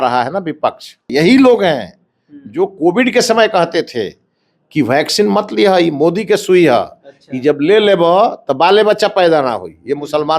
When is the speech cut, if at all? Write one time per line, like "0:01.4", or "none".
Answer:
0:01.0